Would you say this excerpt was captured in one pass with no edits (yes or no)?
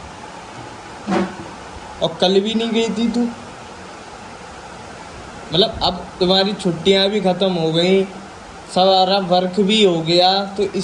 yes